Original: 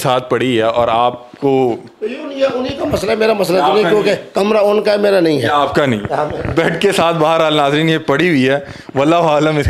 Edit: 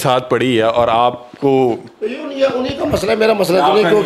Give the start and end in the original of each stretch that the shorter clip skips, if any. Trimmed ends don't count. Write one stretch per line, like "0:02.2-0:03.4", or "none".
none